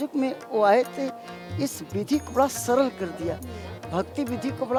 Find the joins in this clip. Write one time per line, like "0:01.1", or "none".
none